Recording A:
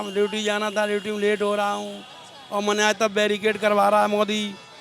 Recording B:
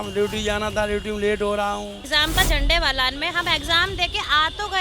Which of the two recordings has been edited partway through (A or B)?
B